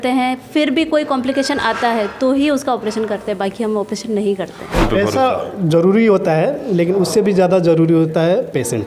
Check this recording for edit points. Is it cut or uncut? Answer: cut